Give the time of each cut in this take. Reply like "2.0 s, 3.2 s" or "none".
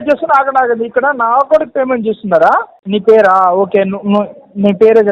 2.8 s